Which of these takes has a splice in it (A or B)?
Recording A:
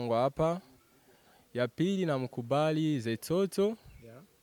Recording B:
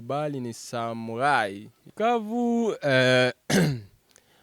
B